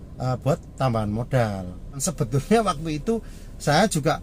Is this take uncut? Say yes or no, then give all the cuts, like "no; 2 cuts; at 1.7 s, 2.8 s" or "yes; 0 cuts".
no; 1 cut; at 2.1 s